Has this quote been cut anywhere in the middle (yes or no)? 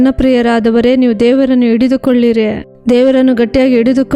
yes